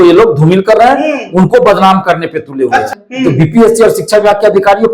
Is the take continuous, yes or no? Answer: no